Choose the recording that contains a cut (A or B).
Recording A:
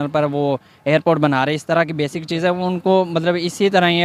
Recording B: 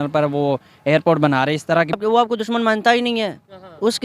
B